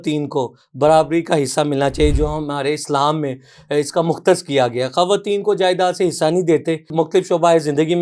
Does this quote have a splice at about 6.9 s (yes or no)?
yes